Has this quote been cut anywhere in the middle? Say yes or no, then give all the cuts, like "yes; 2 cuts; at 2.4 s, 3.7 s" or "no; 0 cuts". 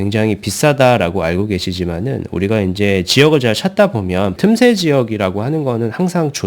yes; 1 cut; at 4.4 s